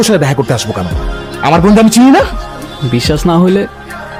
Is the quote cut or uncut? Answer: uncut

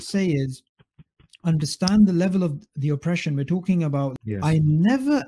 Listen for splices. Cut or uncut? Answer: cut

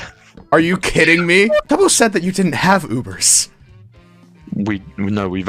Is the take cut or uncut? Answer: cut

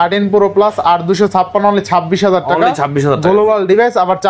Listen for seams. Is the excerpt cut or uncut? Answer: uncut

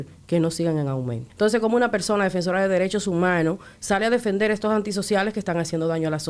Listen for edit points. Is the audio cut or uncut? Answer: cut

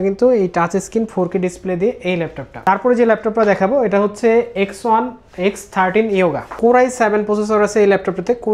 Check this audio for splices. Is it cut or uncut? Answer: uncut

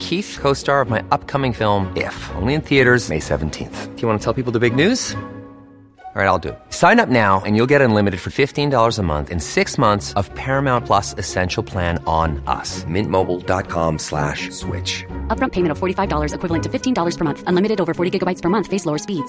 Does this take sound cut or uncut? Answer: uncut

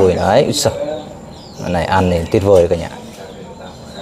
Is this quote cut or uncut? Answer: uncut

